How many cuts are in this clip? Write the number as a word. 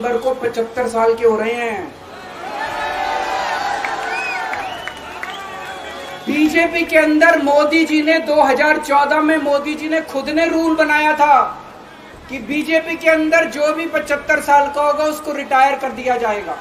zero